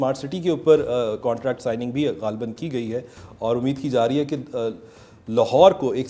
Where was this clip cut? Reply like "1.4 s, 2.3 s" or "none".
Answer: none